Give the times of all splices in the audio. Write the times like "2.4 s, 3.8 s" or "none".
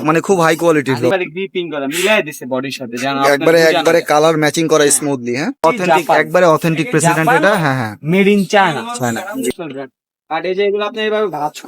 1.1 s, 5.6 s, 9.5 s